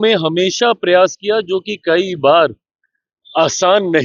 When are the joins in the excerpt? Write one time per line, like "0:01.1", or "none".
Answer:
none